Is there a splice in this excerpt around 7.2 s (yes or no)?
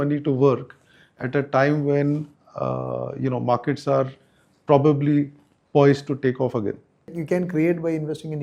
yes